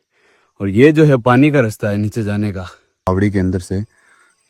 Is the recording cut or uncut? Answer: cut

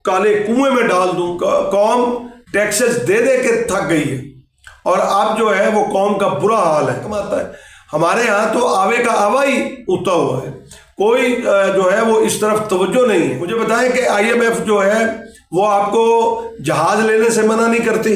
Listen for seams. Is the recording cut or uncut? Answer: cut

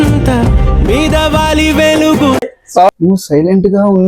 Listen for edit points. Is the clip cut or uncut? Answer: cut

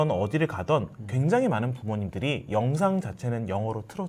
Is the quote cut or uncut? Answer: uncut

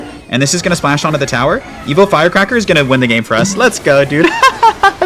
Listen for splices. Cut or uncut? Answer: uncut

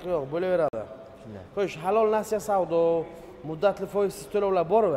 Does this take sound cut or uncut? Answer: uncut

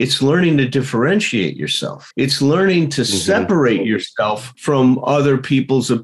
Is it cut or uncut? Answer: uncut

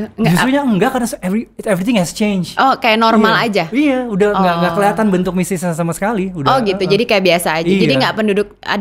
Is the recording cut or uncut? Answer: uncut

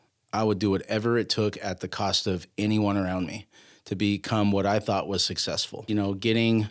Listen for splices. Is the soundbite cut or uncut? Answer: cut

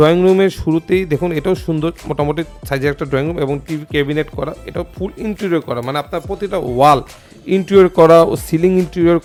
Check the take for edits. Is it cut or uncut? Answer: uncut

